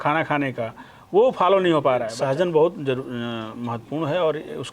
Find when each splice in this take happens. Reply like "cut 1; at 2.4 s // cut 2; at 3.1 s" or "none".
cut 1; at 2.1 s

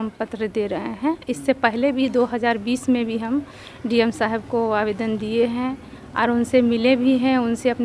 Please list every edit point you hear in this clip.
none

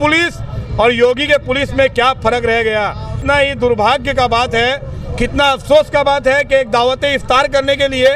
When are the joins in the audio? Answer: cut 1; at 3.1 s

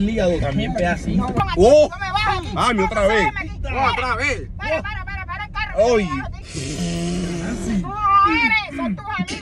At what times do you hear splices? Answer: cut 1; at 1.4 s

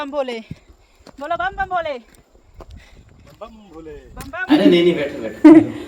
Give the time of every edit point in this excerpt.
cut 1; at 4.4 s

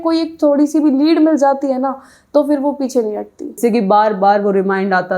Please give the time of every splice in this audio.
cut 1; at 3.6 s

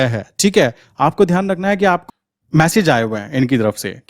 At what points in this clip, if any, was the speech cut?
cut 1; at 2.0 s

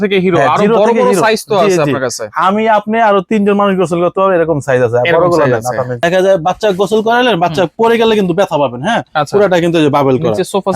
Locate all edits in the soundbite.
cut 1; at 6.0 s

